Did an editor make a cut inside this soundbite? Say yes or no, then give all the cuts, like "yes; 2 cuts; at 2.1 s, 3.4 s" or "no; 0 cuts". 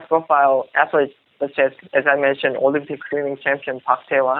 no; 0 cuts